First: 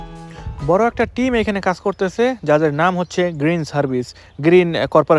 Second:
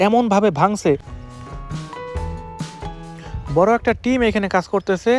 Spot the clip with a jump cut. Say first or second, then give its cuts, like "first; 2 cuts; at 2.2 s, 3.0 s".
second; 1 cut; at 1.1 s